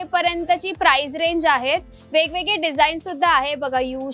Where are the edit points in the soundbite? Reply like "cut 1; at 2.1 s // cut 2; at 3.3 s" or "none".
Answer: none